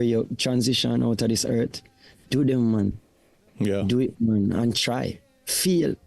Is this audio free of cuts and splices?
yes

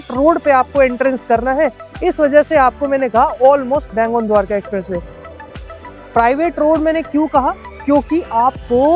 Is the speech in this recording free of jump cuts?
yes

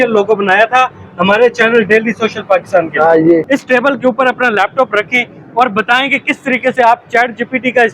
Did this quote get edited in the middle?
yes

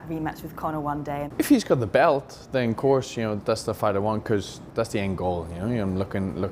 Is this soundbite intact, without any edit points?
no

